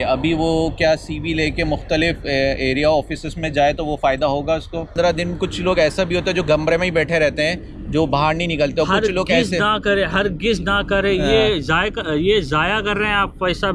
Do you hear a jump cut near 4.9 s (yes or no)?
yes